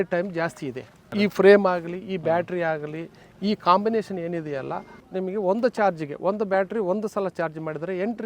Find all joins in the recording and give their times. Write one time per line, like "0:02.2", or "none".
none

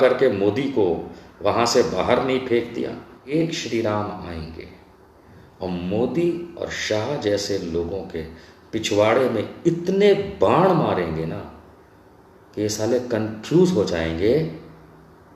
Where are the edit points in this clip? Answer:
0:03.1

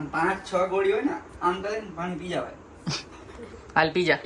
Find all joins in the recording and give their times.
0:02.6

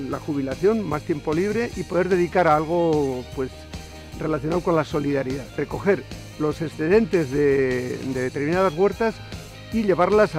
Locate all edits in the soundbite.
0:05.5

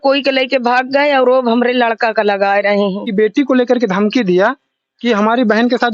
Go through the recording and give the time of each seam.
0:03.1

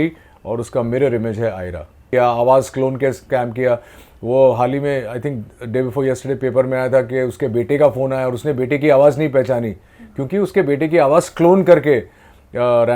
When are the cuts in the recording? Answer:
0:02.0

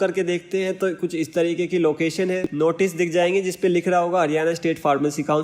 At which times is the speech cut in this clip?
0:02.5

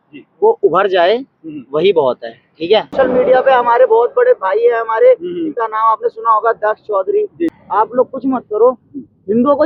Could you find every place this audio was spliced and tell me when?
0:02.9
0:07.6

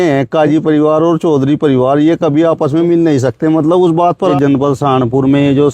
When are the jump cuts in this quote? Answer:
0:04.3

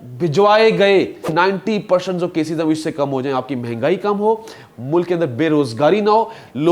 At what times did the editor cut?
0:01.3

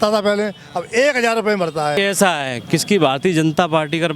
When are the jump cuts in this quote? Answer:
0:02.0

